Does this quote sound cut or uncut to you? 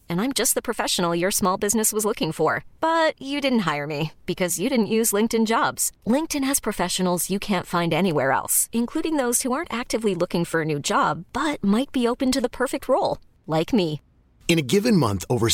uncut